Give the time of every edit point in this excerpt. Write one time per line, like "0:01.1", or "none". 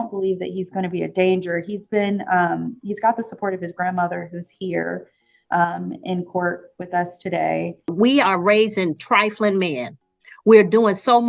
0:07.9